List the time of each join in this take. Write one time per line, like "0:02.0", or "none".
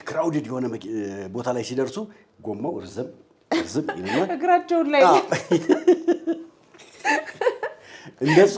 none